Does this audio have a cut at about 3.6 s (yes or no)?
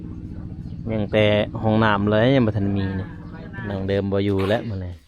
yes